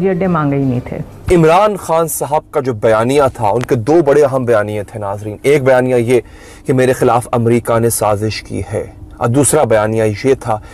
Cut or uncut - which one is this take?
cut